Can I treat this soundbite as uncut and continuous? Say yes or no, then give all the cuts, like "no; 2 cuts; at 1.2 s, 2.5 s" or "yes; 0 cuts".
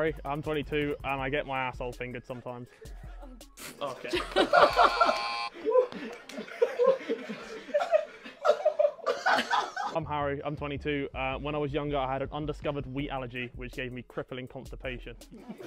yes; 0 cuts